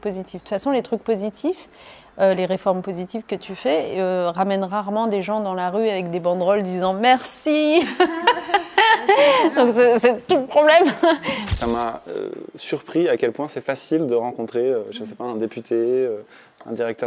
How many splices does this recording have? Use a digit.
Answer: 1